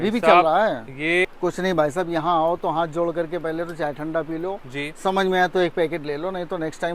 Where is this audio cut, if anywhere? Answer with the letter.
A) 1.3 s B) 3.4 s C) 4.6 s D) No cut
A